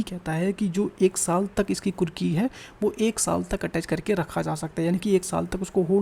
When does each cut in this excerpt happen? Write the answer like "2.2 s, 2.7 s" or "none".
none